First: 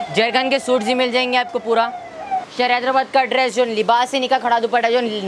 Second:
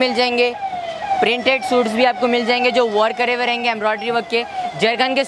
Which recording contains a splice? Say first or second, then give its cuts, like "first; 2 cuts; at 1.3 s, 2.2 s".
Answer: first; 1 cut; at 2.5 s